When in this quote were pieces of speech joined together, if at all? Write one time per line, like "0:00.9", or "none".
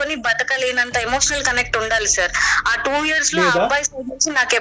none